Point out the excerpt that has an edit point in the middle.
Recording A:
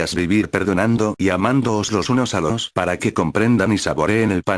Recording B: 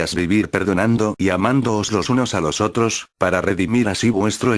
B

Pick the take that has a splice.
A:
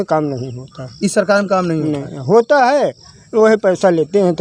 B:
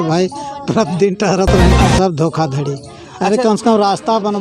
B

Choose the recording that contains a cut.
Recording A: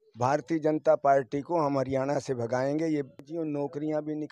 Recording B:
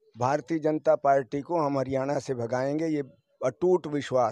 A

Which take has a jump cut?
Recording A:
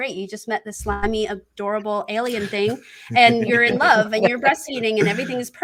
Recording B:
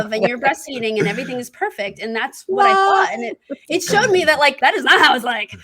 B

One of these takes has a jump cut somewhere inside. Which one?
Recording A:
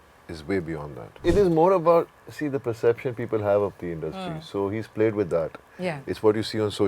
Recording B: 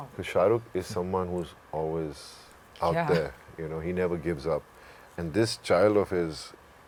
A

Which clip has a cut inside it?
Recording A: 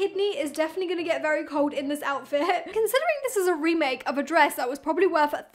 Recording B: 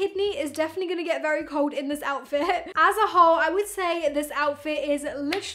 A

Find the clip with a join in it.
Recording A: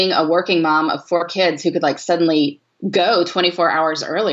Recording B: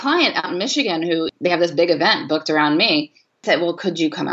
B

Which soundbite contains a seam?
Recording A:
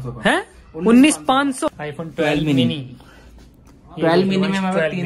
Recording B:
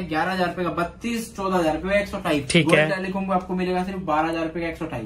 A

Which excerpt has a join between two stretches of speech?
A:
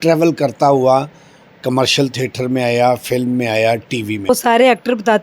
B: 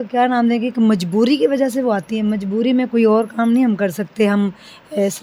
A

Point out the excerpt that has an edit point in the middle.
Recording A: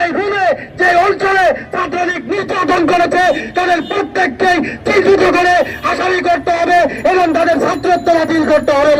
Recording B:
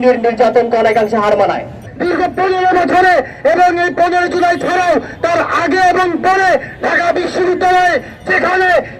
B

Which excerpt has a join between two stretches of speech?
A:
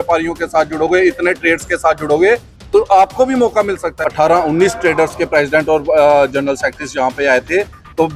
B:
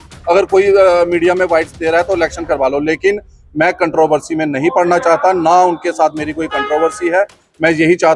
A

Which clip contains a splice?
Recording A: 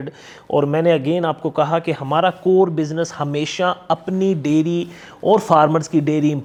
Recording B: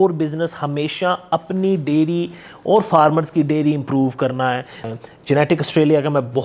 B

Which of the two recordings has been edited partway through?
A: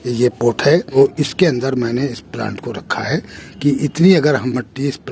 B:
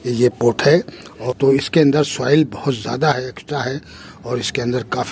A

